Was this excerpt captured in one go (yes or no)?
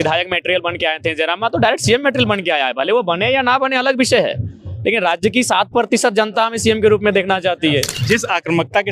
no